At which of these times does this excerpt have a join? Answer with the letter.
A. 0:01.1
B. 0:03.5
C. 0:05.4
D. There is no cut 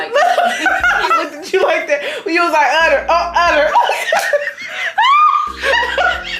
A